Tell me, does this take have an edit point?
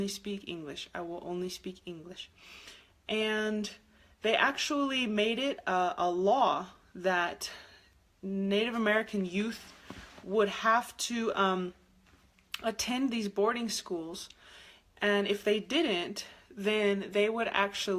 yes; 1 cut; at 11.2 s

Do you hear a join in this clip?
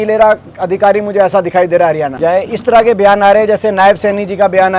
yes; 1 cut; at 2.2 s

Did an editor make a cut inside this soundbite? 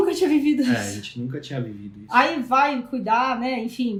no; 0 cuts

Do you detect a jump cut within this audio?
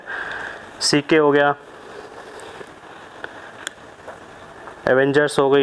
no; 0 cuts

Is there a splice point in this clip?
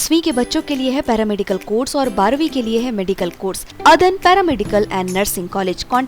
yes; 1 cut; at 3.7 s

